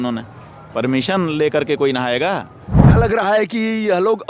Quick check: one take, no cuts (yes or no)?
no